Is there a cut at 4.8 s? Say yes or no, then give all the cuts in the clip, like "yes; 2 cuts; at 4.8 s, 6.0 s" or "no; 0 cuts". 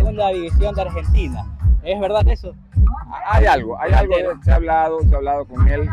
no; 0 cuts